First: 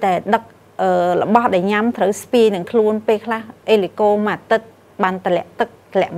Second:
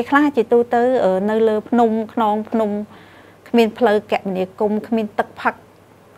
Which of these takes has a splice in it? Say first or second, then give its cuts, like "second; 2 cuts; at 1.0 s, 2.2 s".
second; 1 cut; at 1.6 s